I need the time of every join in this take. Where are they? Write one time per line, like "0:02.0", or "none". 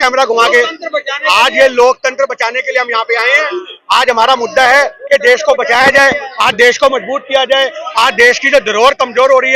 none